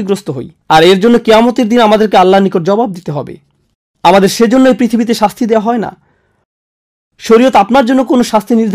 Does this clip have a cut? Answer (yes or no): no